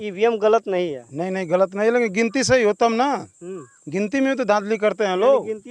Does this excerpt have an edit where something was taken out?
no; 0 cuts

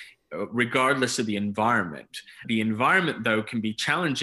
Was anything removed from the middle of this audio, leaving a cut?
yes; 1 cut; at 2.4 s

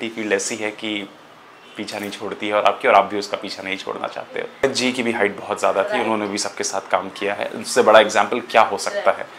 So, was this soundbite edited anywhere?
yes; 1 cut; at 4.6 s

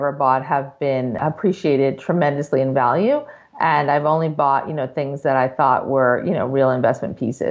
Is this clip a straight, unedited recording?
yes; 0 cuts

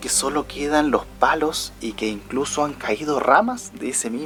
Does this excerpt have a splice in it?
no; 0 cuts

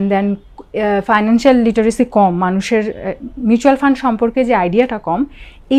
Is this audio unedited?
yes; 0 cuts

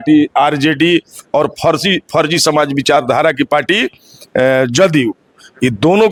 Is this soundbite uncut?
yes; 0 cuts

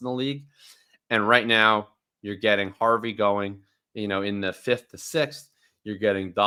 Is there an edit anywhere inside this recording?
no; 0 cuts

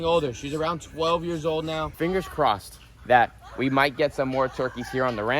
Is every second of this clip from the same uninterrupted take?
no; 1 cut; at 1.9 s

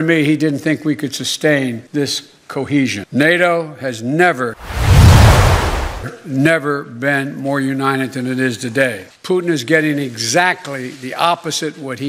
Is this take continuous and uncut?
yes; 0 cuts

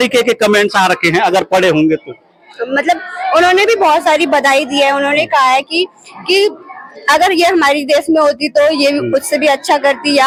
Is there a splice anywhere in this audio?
no; 0 cuts

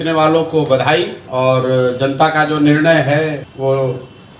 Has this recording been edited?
yes; 2 cuts; at 1.2 s, 3.5 s

